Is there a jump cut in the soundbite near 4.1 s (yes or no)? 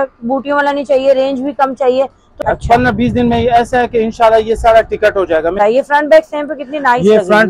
no